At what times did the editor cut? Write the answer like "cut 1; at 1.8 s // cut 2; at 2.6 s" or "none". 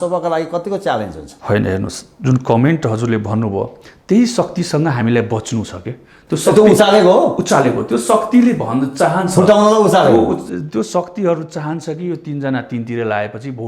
none